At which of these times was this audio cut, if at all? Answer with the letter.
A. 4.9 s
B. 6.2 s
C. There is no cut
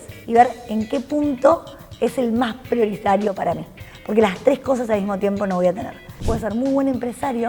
B